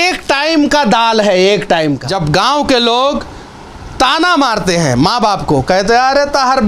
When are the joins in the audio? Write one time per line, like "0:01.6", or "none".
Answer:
0:02.1